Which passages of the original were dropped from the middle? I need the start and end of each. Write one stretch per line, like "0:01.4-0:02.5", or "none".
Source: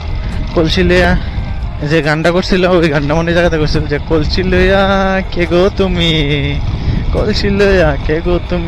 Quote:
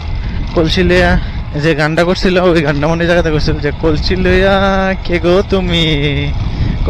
0:01.1-0:01.3